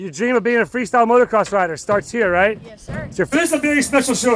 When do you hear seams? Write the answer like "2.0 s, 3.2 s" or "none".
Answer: 3.3 s